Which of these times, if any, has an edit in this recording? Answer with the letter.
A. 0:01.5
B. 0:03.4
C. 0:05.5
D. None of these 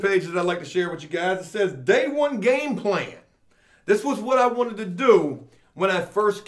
D